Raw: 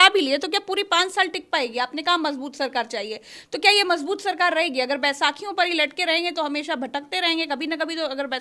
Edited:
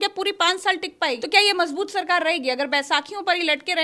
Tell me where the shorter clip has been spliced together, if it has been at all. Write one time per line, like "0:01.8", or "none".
0:01.2